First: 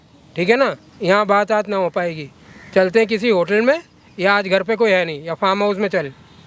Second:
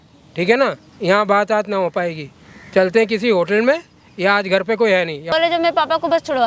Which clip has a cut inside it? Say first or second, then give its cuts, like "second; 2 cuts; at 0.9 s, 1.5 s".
second; 1 cut; at 5.3 s